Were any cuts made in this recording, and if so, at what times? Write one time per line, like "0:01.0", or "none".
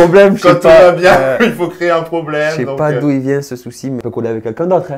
0:04.0